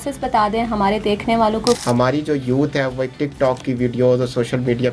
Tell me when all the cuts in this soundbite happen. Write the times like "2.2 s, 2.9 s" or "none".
1.8 s